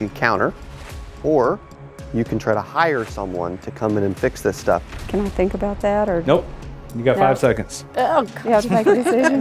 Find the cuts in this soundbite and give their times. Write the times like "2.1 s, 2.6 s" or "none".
4.8 s